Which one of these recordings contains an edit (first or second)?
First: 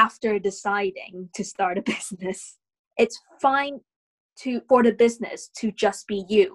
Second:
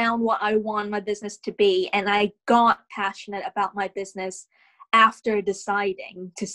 first